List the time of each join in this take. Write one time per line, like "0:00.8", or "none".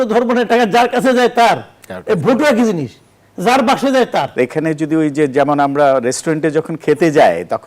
0:04.3